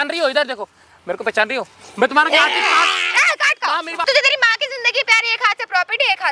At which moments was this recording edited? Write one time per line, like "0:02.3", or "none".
0:04.0